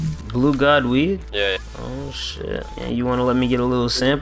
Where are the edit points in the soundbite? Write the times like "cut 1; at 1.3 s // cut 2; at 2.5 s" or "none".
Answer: none